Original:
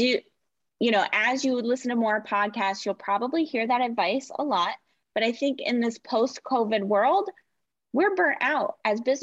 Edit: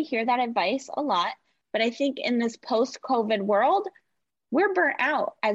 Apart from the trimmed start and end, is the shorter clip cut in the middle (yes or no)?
no